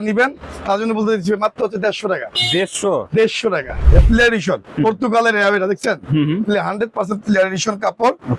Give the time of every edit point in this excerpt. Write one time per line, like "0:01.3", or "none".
0:03.8